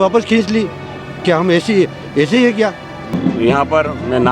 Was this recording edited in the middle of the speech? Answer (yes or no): yes